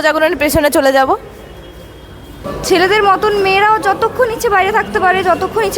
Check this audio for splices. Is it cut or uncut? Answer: cut